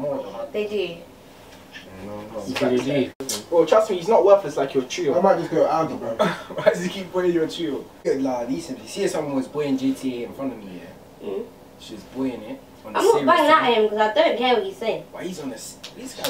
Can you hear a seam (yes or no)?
yes